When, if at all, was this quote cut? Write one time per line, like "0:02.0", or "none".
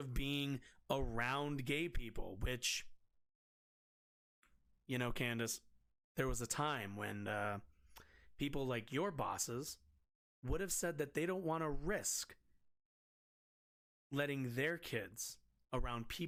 none